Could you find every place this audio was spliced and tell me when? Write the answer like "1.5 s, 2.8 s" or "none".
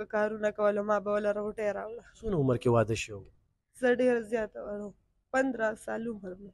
2.2 s